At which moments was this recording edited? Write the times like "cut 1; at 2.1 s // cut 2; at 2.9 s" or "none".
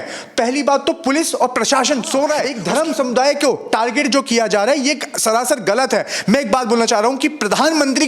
cut 1; at 2.5 s